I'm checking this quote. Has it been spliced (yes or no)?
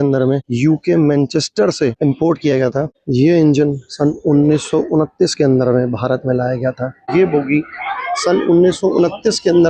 yes